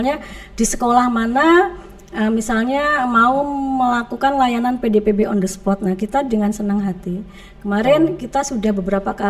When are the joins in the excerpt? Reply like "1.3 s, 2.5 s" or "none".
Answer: none